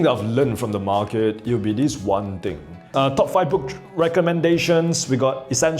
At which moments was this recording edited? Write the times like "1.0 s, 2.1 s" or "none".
2.9 s